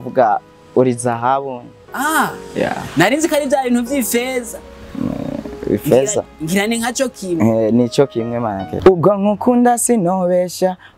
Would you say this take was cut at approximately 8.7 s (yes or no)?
yes